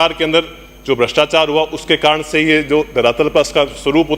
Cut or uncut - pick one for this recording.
uncut